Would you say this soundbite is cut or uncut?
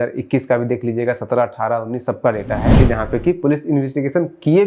cut